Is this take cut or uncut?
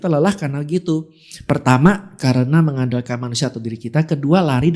uncut